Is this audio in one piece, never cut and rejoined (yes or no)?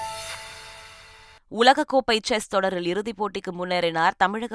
no